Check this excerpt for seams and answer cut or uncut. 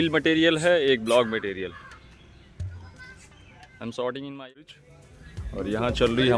cut